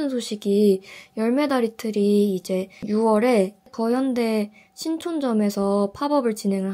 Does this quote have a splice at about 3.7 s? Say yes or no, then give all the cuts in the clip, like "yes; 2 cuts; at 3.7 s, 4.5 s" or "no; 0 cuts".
yes; 2 cuts; at 2.9 s, 3.7 s